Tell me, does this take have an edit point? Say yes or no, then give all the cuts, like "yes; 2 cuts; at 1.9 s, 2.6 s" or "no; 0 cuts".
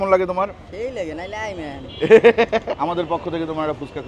yes; 1 cut; at 2.7 s